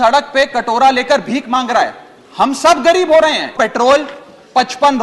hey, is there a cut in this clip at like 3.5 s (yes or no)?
yes